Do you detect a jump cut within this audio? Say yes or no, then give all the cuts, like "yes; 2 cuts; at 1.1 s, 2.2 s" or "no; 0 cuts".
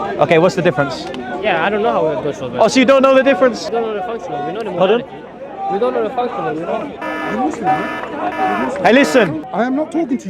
yes; 2 cuts; at 3.6 s, 9.5 s